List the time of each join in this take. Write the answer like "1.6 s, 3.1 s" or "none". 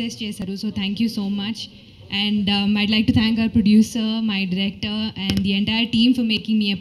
none